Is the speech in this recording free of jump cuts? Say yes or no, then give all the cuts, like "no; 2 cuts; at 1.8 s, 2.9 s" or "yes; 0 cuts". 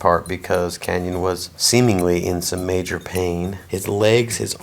no; 2 cuts; at 1.5 s, 3.6 s